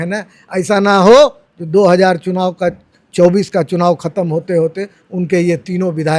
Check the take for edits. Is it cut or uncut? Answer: uncut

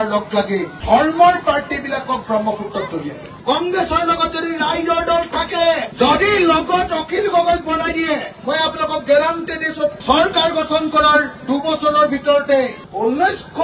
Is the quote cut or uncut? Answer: cut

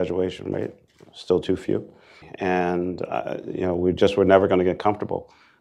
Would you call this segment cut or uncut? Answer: cut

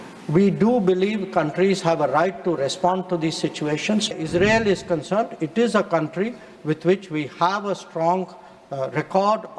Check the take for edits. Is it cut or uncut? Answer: cut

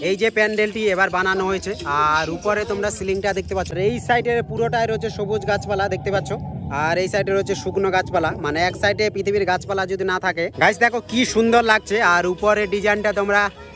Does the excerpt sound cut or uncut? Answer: cut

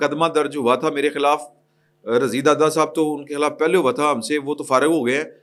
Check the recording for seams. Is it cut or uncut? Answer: uncut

